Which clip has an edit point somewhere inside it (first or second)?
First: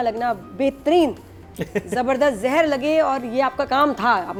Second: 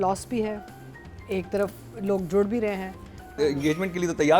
second